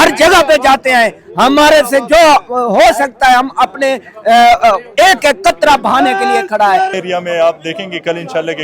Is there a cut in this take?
yes; 1 cut; at 6.9 s

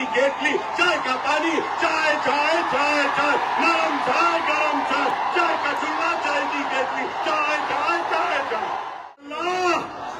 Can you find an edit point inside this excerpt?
yes; 1 cut; at 9.2 s

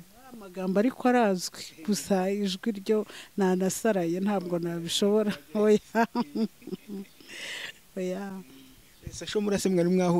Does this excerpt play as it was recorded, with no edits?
yes; 0 cuts

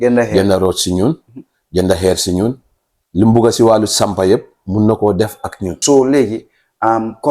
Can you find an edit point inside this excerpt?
yes; 1 cut; at 5.7 s

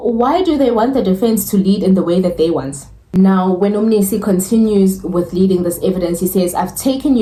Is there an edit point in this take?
no; 0 cuts

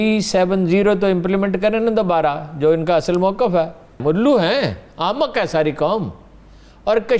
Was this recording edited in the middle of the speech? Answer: yes; 1 cut; at 4.0 s

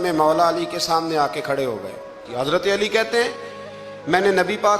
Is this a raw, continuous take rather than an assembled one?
no; 1 cut; at 2.2 s

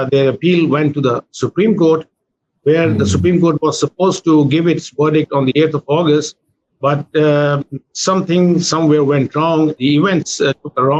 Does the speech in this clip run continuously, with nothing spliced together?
no; 1 cut; at 9.8 s

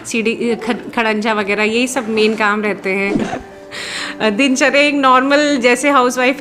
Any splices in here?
yes; 1 cut; at 3.2 s

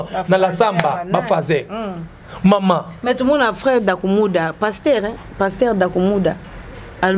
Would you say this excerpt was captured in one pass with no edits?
yes; 0 cuts

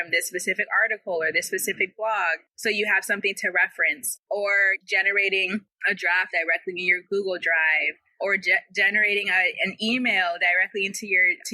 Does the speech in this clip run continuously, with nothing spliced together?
no; 3 cuts; at 2.5 s, 4.1 s, 5.7 s

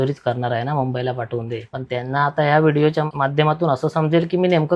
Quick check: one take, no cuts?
no; 2 cuts; at 1.8 s, 3.1 s

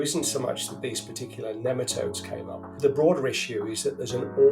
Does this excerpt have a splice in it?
yes; 1 cut; at 2.8 s

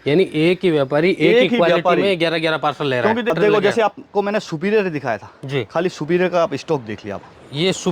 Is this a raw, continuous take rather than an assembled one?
no; 1 cut; at 3.3 s

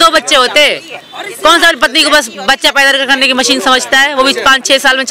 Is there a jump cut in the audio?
no; 0 cuts

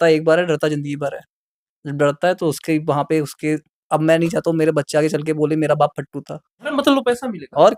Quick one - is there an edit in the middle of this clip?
yes; 1 cut; at 6.7 s

